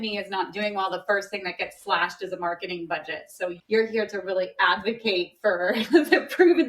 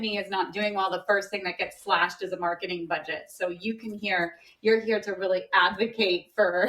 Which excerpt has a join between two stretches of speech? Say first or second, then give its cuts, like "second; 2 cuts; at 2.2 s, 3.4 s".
first; 1 cut; at 3.6 s